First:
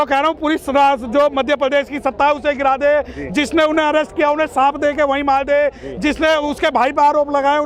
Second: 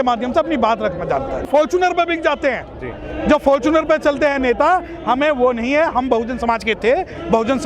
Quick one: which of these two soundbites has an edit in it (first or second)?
second